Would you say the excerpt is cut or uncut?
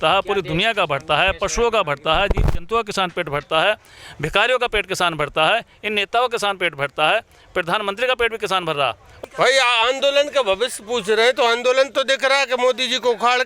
cut